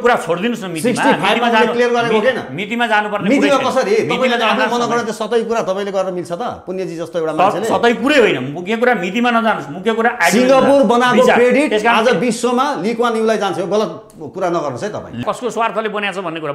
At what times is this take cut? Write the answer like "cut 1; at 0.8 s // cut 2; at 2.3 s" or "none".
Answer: cut 1; at 15.2 s